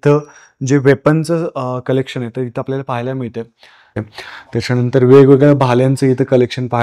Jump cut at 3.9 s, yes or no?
yes